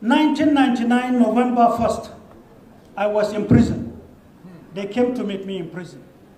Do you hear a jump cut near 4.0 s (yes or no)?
yes